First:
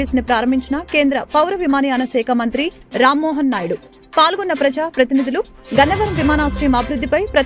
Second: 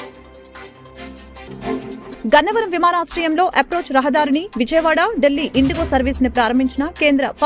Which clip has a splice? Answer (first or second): second